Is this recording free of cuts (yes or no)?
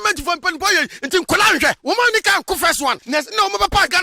no